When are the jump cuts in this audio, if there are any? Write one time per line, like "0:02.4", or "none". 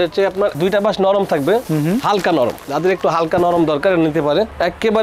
none